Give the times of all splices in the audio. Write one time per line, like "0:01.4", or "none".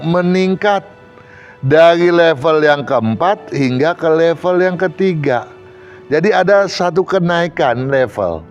none

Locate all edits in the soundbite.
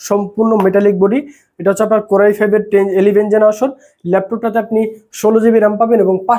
none

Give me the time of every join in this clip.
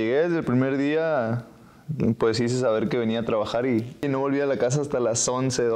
0:04.0

